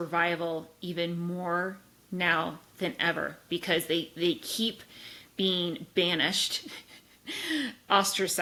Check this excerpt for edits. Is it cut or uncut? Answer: uncut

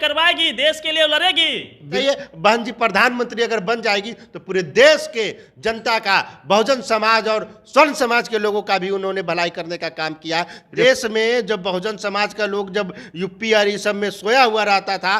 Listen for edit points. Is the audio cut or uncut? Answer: cut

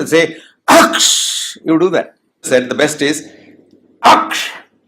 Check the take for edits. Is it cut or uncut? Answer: cut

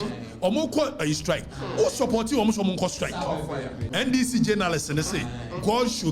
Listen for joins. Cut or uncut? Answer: cut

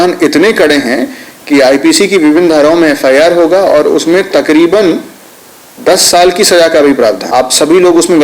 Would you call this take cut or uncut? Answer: cut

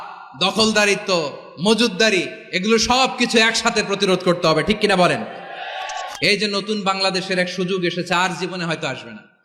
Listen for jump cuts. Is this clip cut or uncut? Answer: cut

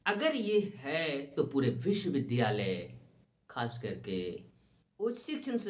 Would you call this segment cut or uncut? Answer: uncut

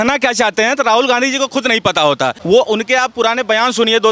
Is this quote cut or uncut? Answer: cut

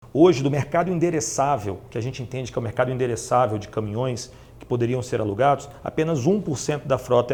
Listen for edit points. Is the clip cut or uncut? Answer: uncut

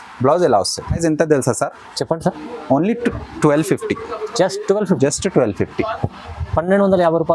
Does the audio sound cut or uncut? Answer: cut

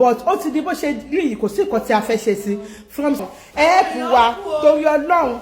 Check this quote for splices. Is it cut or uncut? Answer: cut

